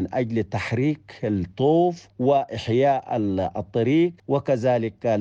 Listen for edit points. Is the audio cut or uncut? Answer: cut